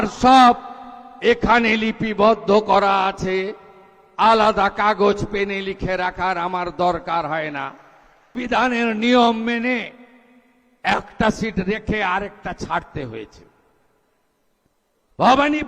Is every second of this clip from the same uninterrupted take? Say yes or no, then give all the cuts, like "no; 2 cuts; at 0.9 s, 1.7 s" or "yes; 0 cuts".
no; 1 cut; at 8.4 s